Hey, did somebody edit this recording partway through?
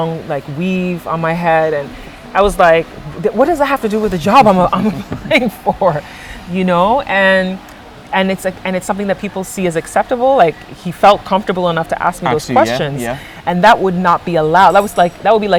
no; 0 cuts

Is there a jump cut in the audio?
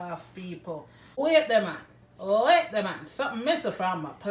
yes; 1 cut; at 1.2 s

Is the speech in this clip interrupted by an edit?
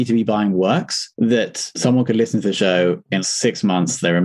no; 0 cuts

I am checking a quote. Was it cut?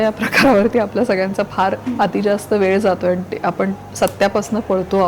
yes; 2 cuts; at 1.8 s, 3.8 s

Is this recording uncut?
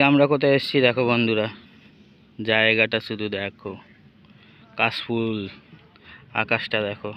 yes; 0 cuts

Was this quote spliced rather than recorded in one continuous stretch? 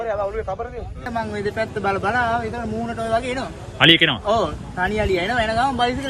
yes; 1 cut; at 1.0 s

